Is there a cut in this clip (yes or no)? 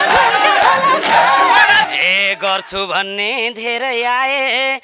yes